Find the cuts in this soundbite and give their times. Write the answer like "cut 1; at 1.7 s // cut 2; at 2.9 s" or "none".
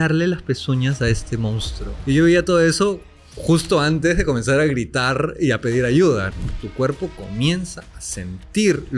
cut 1; at 1.9 s // cut 2; at 6.3 s